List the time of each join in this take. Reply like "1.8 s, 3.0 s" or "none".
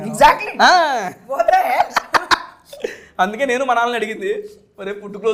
none